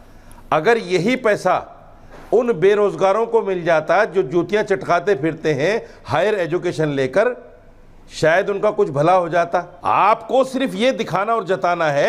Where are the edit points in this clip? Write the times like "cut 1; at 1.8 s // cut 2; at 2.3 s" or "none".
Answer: cut 1; at 9.7 s

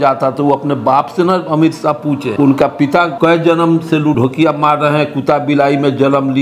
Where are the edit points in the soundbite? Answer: cut 1; at 2.3 s // cut 2; at 3.1 s // cut 3; at 4.2 s

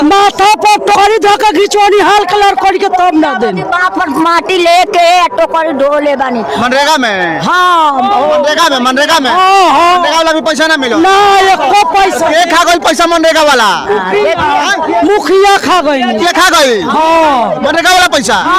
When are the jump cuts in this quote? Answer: cut 1; at 0.9 s

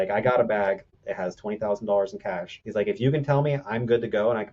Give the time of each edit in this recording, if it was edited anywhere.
cut 1; at 0.9 s // cut 2; at 2.5 s

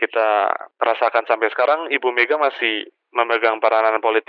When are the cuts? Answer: none

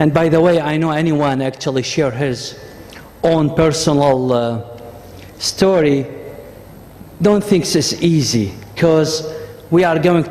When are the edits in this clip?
cut 1; at 1.3 s

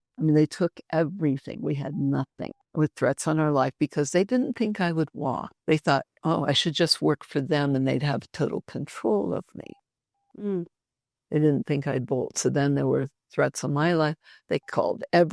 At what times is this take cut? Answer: cut 1; at 2.6 s // cut 2; at 5.5 s

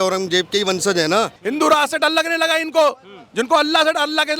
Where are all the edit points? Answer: cut 1; at 1.4 s

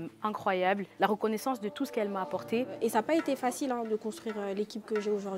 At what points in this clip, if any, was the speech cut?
cut 1; at 0.9 s // cut 2; at 2.7 s

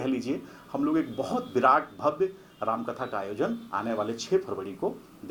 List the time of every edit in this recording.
none

